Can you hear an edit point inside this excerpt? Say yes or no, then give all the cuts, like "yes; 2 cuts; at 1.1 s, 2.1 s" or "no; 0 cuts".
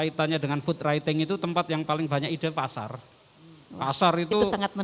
no; 0 cuts